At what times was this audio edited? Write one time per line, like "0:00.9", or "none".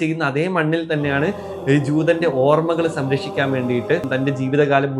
0:04.1

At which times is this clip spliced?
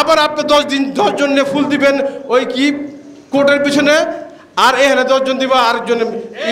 none

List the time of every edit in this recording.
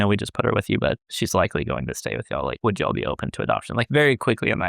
0:01.1

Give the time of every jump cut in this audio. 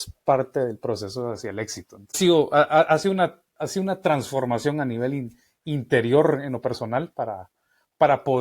0:02.2

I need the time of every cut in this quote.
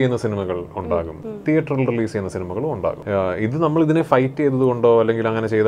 0:01.2
0:03.0

